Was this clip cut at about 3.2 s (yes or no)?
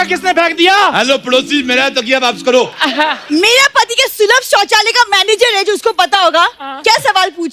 yes